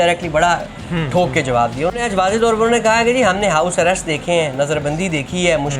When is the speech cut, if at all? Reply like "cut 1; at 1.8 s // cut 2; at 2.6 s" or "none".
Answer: cut 1; at 2.0 s